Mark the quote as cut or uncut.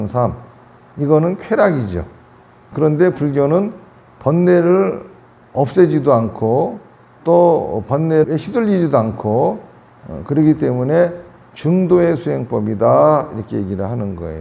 uncut